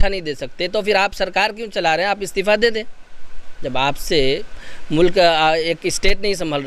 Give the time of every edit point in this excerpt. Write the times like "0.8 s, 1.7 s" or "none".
none